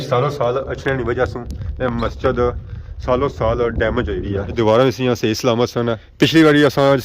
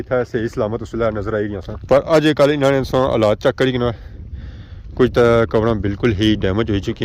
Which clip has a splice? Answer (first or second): first